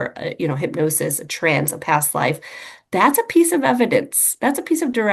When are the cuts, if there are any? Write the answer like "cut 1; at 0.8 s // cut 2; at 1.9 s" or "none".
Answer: none